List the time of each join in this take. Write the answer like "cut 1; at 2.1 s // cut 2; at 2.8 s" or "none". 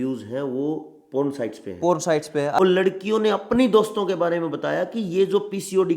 cut 1; at 2.6 s

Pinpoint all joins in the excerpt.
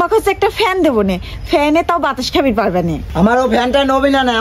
none

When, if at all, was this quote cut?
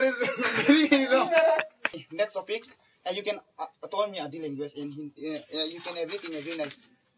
cut 1; at 2.0 s

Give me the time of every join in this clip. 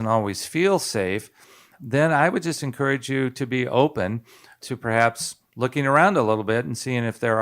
cut 1; at 1.7 s // cut 2; at 4.6 s

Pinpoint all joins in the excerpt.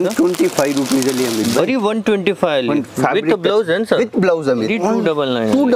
cut 1; at 4.7 s

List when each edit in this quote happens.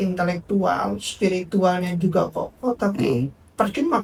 none

